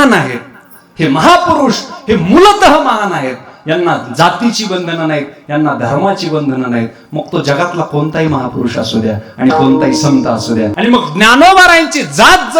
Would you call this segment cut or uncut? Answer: cut